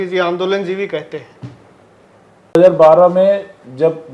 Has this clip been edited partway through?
yes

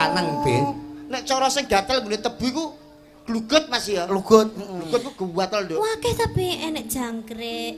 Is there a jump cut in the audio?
no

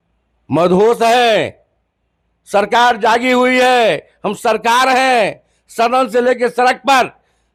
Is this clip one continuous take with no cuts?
yes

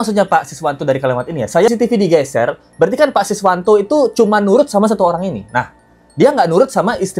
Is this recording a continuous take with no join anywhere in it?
no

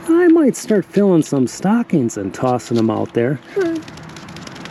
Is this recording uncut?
no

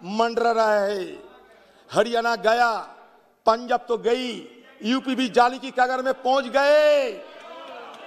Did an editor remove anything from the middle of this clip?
no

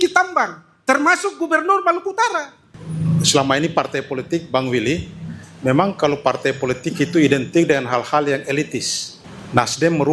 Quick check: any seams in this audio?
yes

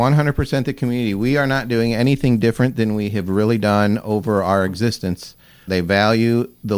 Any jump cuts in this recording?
yes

